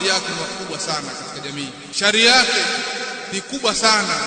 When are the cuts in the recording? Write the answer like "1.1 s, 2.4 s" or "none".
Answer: 1.8 s, 3.2 s